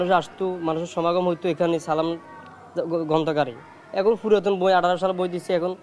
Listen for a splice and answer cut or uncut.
uncut